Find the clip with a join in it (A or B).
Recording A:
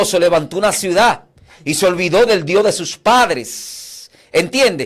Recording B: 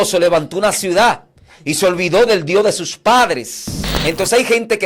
B